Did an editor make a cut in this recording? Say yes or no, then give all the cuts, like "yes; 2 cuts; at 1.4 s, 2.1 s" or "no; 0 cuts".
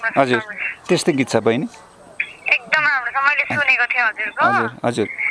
no; 0 cuts